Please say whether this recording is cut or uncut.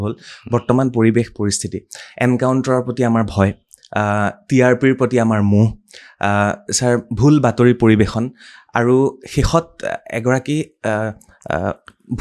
uncut